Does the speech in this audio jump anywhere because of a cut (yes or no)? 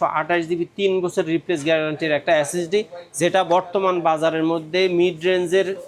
no